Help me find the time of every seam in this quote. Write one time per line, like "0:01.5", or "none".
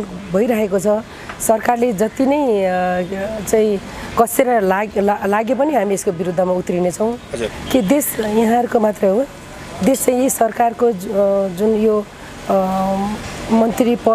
0:07.4